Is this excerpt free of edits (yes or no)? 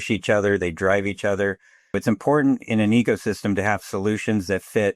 no